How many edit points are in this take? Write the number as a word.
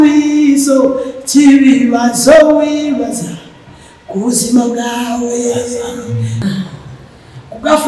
one